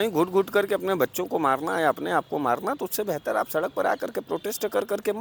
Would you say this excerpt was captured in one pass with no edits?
yes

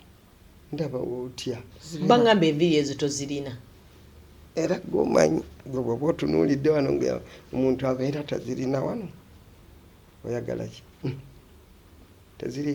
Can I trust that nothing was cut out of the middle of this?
no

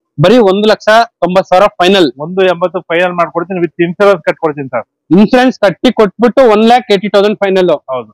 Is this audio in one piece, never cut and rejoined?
yes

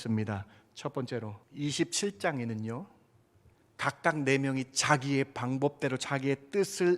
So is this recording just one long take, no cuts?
no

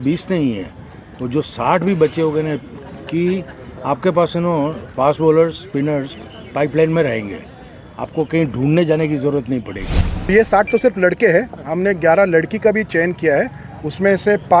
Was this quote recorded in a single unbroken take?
no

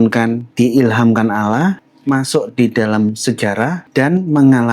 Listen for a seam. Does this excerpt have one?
yes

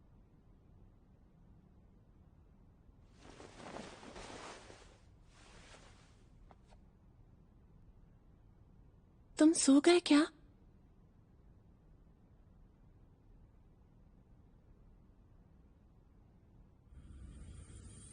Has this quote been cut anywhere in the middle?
yes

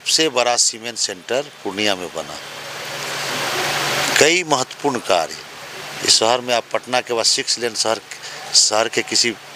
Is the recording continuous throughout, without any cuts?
yes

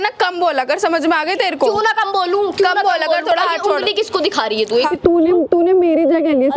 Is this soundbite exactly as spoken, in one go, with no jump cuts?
no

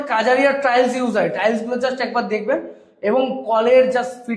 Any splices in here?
no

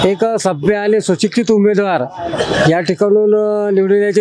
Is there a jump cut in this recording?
no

